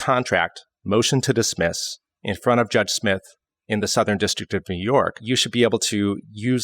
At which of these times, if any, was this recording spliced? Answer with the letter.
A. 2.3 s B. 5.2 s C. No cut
B